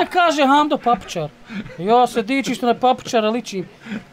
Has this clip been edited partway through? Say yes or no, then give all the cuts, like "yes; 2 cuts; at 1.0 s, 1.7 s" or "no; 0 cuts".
no; 0 cuts